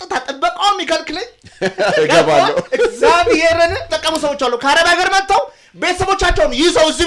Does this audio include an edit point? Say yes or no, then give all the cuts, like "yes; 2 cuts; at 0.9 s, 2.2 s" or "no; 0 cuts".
yes; 1 cut; at 3.9 s